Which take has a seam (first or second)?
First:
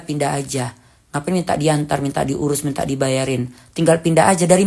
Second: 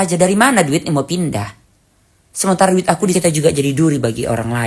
second